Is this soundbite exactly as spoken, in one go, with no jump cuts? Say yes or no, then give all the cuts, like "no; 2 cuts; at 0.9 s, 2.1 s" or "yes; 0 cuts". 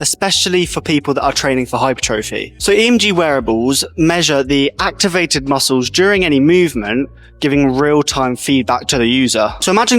yes; 0 cuts